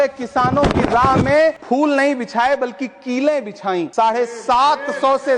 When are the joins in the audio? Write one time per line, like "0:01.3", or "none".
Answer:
0:01.6
0:03.9